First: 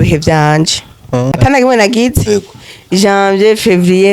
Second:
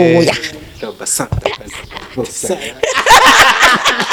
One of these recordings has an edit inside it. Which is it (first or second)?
first